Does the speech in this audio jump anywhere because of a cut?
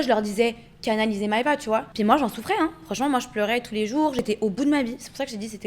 yes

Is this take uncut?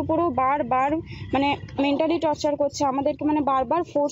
yes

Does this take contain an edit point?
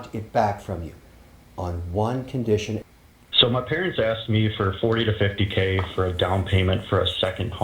yes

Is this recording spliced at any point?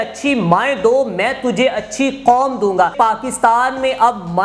yes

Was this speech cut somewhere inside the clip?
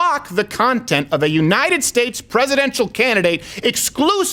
no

